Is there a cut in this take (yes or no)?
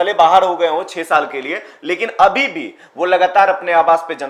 no